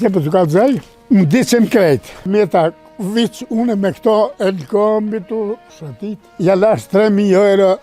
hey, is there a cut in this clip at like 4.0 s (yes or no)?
no